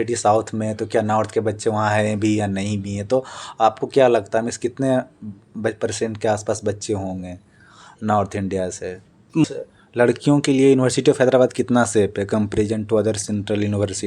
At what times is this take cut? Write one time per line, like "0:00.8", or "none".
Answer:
0:09.4